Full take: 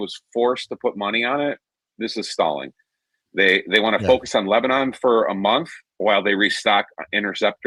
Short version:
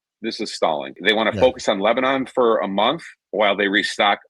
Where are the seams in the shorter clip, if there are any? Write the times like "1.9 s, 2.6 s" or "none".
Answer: 1.0 s